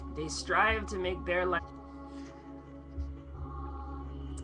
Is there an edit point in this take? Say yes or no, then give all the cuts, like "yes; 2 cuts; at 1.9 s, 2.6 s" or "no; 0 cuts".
no; 0 cuts